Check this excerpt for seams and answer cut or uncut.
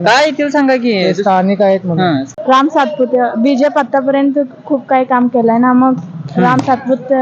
cut